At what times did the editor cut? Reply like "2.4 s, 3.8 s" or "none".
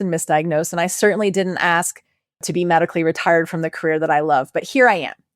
2.4 s